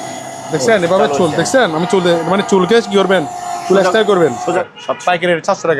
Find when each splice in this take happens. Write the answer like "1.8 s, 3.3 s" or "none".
4.6 s